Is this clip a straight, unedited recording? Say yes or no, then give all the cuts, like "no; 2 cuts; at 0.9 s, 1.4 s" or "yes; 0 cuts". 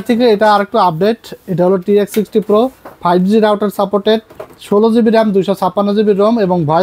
yes; 0 cuts